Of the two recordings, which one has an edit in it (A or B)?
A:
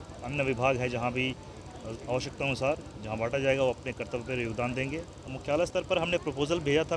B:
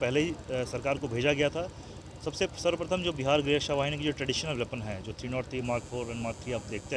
A